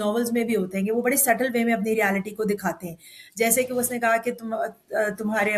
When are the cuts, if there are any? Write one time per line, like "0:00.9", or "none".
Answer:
none